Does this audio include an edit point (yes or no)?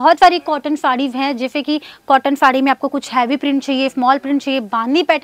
no